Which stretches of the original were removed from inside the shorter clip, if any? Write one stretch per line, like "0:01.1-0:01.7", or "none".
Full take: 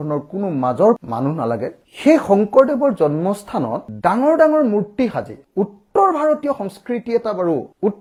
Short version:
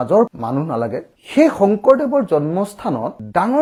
none